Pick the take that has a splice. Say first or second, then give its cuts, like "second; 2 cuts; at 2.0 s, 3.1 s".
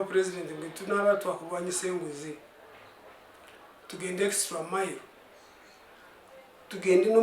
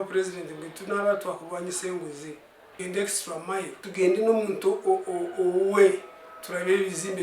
second; 2 cuts; at 2.6 s, 3.8 s